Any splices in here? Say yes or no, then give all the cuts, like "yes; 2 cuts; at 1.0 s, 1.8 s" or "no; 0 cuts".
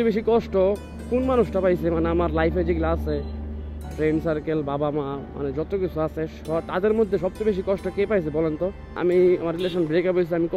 yes; 1 cut; at 8.9 s